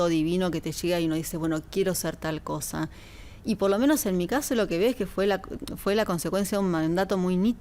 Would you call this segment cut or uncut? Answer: uncut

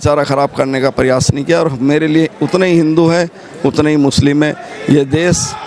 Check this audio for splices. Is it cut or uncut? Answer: uncut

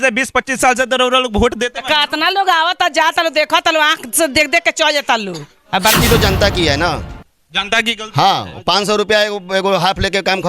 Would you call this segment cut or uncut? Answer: cut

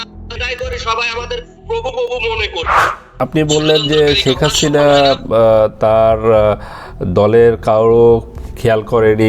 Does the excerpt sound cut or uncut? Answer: cut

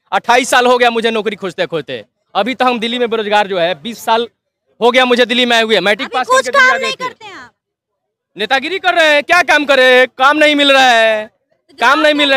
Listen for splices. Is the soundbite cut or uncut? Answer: uncut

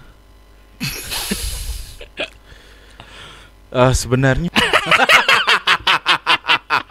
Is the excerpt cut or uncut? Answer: cut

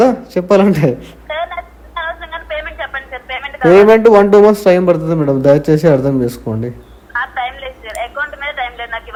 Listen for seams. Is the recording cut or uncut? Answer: uncut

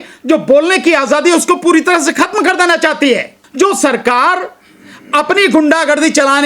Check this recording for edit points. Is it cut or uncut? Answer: cut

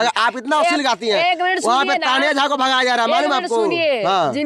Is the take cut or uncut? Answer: uncut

